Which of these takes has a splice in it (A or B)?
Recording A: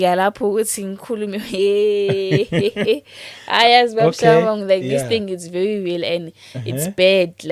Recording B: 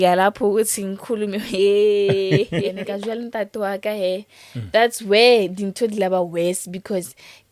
B